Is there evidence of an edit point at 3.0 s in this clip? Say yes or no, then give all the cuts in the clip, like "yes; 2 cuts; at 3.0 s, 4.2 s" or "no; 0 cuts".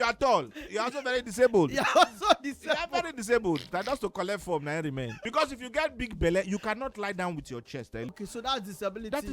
no; 2 cuts; at 5.2 s, 8.1 s